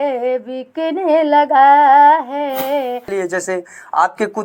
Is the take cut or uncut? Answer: cut